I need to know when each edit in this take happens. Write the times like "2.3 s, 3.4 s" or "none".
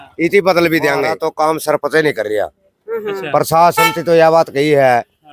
1.1 s